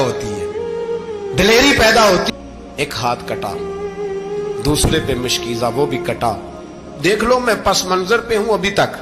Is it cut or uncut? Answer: cut